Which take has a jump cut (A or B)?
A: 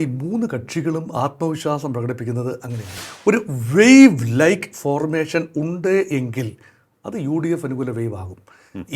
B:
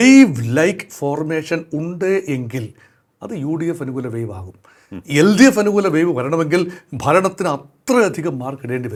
A